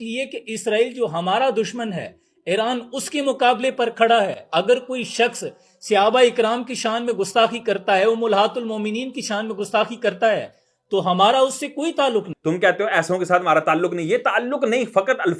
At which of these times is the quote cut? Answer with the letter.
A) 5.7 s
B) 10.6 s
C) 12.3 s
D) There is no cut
C